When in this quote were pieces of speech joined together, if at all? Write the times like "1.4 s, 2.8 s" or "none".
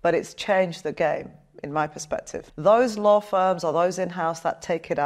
2.4 s

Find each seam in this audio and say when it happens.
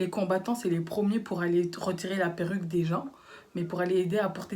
none

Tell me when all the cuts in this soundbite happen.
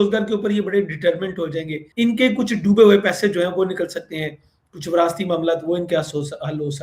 1.8 s

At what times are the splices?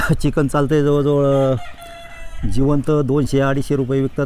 none

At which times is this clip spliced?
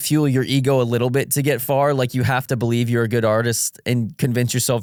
none

